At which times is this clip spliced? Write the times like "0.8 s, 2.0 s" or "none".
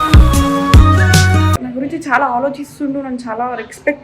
1.6 s